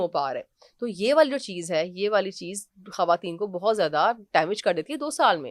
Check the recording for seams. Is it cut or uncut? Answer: uncut